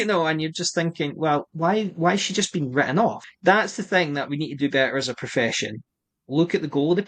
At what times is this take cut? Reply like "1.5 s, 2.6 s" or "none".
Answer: 1.5 s, 3.2 s